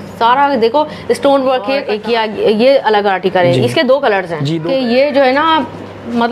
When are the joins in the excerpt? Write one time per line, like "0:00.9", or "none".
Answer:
0:01.9
0:04.4